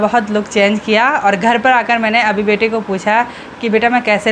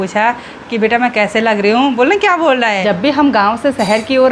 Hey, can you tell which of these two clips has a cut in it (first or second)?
second